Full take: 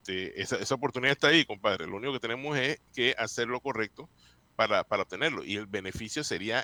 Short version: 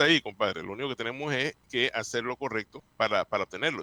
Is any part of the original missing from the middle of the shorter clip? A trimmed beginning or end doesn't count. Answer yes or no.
yes